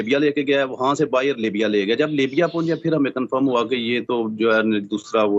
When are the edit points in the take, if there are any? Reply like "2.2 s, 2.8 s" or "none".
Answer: none